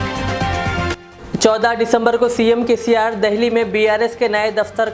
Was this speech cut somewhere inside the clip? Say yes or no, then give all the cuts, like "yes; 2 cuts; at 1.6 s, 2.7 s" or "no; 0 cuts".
no; 0 cuts